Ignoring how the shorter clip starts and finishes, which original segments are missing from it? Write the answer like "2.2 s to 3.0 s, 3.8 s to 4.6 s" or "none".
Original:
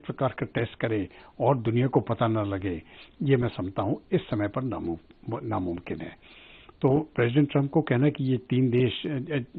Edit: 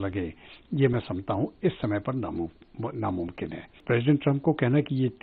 6.3 s to 7.1 s